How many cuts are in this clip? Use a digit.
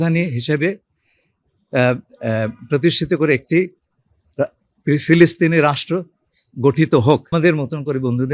1